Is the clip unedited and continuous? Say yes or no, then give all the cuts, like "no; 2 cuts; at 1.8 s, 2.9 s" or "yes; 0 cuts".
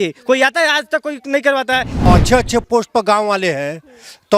no; 1 cut; at 2.1 s